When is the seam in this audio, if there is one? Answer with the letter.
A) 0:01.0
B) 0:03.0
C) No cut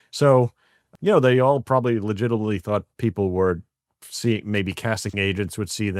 C